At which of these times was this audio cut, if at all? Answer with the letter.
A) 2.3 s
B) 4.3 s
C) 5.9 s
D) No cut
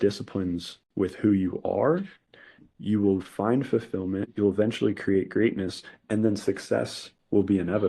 B